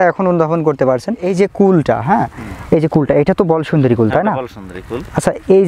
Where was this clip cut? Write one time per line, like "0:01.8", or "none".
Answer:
0:01.2